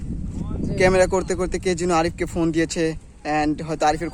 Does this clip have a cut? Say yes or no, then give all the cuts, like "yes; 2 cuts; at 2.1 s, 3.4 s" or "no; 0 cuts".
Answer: no; 0 cuts